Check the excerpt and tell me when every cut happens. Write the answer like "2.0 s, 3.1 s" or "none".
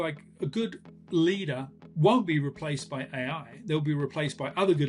1.9 s